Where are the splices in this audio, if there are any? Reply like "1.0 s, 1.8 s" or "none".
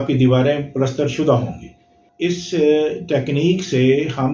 2.0 s